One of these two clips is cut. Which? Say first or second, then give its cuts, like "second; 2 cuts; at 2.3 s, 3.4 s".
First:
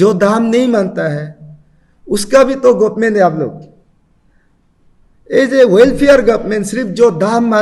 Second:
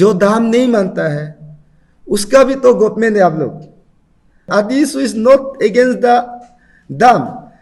second; 1 cut; at 4.5 s